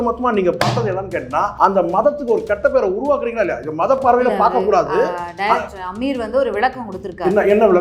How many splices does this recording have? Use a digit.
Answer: 1